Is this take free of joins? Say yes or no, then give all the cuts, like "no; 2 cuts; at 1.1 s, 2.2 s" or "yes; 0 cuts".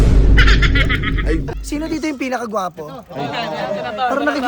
no; 1 cut; at 1.2 s